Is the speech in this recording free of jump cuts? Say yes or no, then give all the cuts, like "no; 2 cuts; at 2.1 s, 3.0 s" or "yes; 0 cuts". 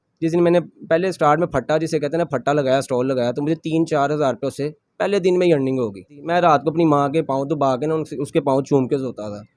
no; 1 cut; at 6.2 s